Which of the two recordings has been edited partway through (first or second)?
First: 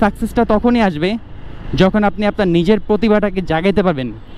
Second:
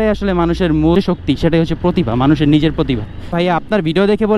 second